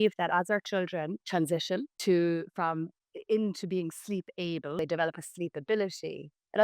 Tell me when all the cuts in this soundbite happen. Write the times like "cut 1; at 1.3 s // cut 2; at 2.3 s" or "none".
cut 1; at 1.2 s // cut 2; at 1.9 s // cut 3; at 4.8 s